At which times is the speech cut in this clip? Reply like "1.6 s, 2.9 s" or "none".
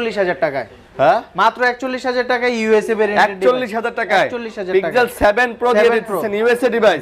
none